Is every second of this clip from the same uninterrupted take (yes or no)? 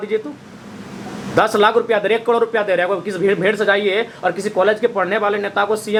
yes